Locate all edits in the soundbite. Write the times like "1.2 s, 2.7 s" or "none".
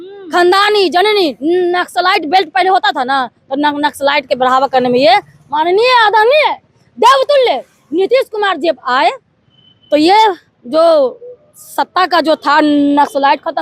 none